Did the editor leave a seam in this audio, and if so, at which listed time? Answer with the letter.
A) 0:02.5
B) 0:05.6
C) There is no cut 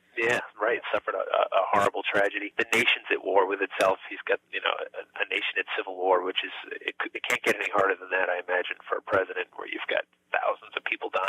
A